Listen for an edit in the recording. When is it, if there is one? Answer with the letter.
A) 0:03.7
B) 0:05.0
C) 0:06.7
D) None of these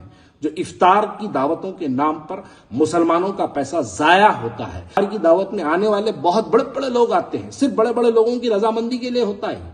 B